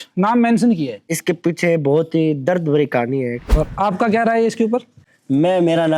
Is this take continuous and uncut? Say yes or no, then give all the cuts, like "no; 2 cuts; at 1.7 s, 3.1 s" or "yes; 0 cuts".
no; 2 cuts; at 1.1 s, 3.4 s